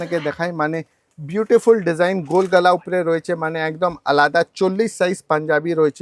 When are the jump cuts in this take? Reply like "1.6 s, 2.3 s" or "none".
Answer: none